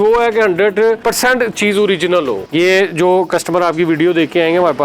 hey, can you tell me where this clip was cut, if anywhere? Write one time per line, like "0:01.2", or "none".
0:01.0
0:02.4

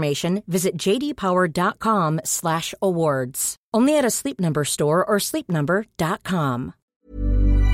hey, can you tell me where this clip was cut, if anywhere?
0:06.8

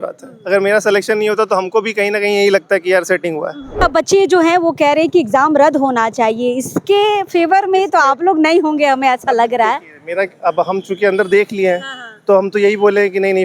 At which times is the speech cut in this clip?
0:03.8

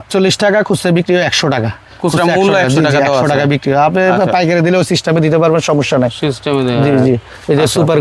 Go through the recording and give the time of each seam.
none

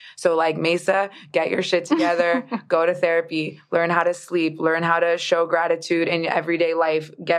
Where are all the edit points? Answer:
none

